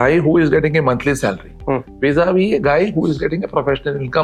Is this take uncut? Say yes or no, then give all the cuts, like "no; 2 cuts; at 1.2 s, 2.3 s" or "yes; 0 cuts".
yes; 0 cuts